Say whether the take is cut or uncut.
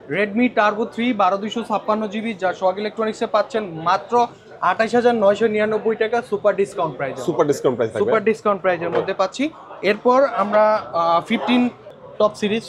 uncut